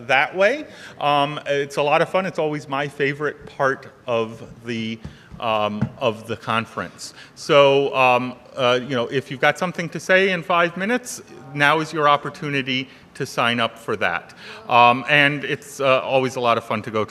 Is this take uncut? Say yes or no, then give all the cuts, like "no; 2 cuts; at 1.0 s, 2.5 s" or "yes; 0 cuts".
yes; 0 cuts